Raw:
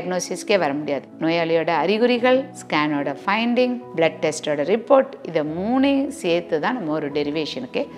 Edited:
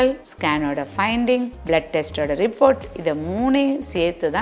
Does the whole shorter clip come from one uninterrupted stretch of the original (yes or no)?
yes